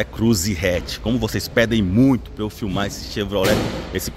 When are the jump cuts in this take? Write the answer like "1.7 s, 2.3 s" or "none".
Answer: none